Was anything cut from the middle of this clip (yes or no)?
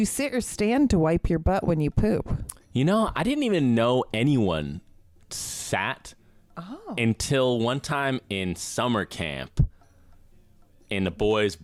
no